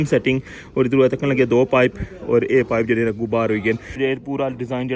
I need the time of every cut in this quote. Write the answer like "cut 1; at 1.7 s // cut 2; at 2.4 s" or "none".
cut 1; at 4.0 s